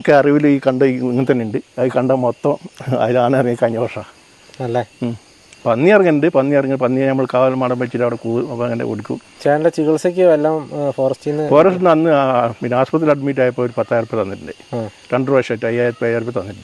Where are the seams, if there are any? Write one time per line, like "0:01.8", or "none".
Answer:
none